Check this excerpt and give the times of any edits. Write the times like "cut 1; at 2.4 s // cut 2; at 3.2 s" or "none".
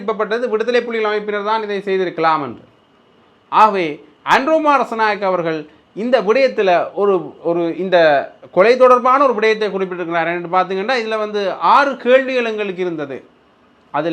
none